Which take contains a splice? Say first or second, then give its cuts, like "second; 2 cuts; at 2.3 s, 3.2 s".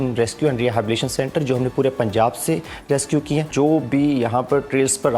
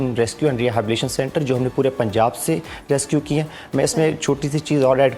first; 1 cut; at 3.5 s